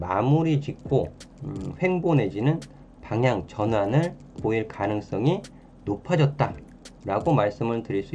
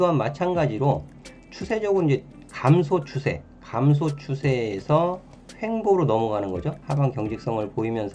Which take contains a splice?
second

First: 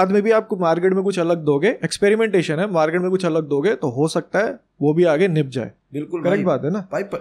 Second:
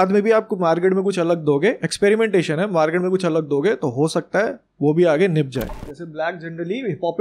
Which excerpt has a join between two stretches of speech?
second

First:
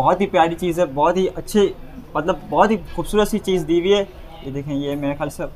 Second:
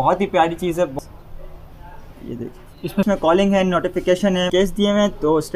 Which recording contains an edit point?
second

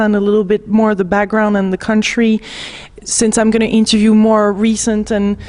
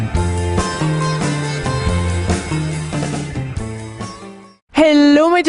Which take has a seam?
second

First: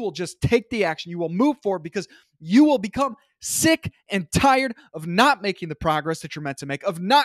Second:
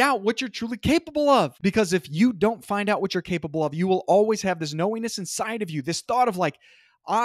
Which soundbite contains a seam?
second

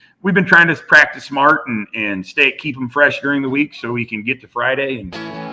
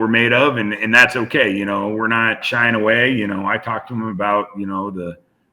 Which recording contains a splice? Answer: second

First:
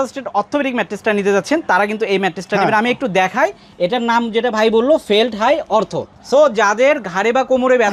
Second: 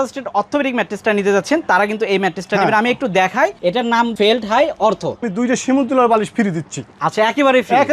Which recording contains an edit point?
second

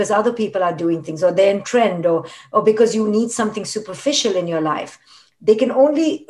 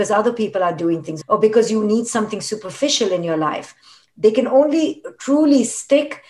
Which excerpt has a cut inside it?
second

